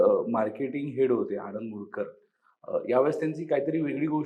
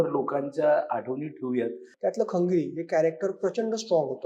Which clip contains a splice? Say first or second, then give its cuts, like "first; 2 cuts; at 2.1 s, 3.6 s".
second; 1 cut; at 1.8 s